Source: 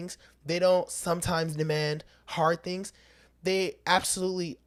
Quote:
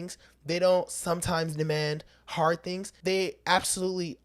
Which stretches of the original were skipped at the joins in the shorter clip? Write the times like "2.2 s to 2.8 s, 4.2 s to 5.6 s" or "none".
2.9 s to 3.3 s